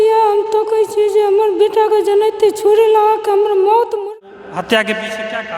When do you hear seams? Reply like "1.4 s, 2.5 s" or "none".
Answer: 4.0 s